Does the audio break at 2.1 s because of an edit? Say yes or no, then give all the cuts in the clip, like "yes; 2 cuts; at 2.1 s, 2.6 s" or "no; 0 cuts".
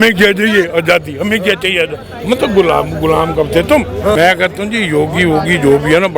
no; 1 cut; at 4.2 s